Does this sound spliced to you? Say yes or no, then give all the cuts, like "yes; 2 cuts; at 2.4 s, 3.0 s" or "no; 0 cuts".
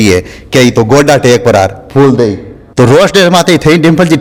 no; 0 cuts